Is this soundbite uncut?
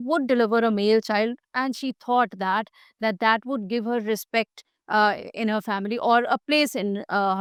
yes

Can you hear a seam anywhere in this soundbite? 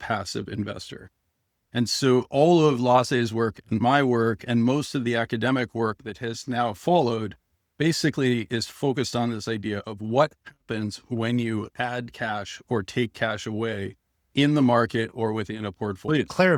no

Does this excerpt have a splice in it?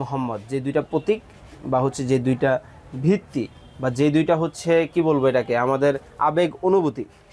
no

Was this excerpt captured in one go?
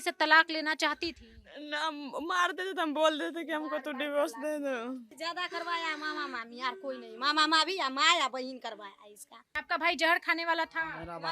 no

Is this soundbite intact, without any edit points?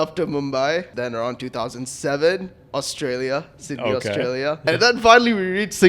no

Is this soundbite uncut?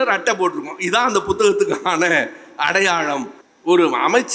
no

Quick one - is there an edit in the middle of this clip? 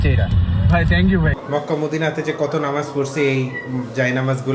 yes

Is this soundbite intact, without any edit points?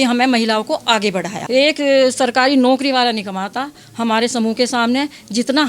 no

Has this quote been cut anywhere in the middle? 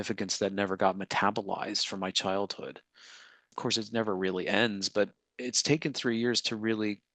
yes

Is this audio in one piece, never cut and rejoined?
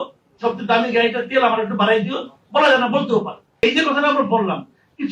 no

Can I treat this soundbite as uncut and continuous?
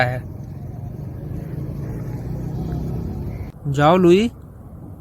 no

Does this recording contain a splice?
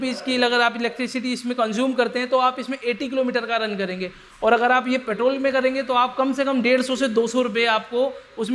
no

